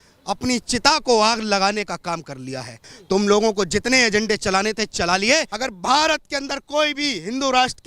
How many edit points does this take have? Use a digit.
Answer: 2